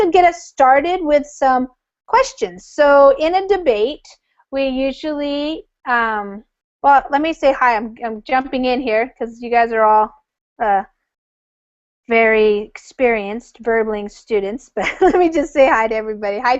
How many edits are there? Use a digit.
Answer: 1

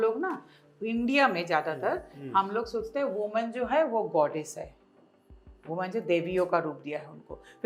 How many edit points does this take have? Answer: 0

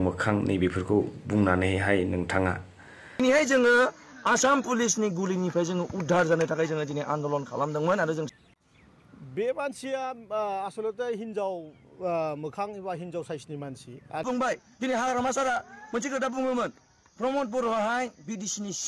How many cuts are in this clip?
3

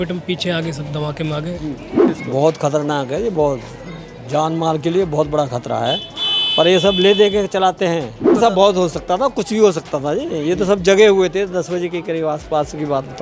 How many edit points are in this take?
2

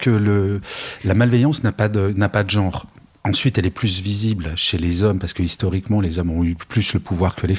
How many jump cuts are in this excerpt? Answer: 0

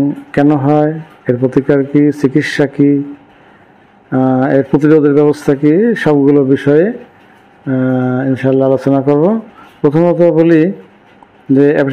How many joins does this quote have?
0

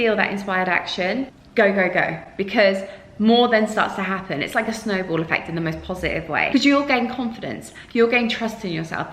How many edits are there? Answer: 2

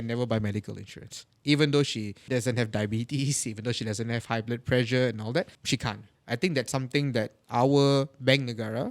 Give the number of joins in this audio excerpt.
2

